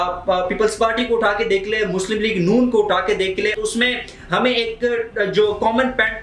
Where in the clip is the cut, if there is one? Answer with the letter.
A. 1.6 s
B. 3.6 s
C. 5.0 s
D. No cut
B